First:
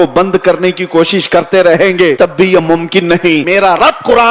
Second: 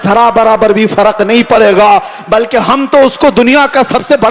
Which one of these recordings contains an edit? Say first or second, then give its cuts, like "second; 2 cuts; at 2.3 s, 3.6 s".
first; 2 cuts; at 2.2 s, 3.4 s